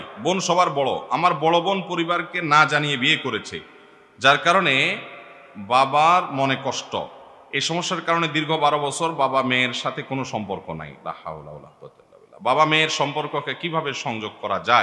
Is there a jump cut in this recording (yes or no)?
no